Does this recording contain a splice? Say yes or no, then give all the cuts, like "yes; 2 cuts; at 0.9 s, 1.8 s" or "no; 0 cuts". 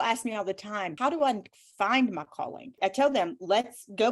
yes; 2 cuts; at 0.9 s, 2.7 s